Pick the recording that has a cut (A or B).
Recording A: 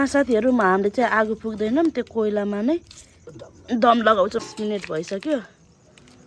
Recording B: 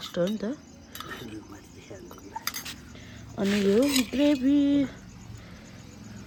A